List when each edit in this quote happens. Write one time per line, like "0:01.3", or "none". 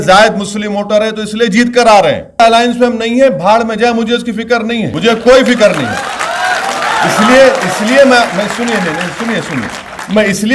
0:02.4
0:04.9